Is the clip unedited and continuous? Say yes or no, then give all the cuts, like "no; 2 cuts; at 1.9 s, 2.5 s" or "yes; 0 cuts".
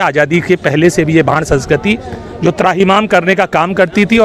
yes; 0 cuts